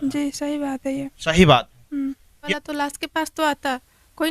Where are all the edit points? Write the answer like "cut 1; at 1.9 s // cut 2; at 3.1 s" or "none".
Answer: cut 1; at 2.3 s